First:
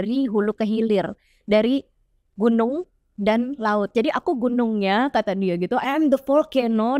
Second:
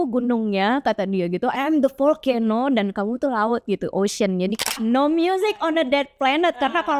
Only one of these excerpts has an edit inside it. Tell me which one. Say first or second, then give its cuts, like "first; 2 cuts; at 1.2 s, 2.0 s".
second; 1 cut; at 4.7 s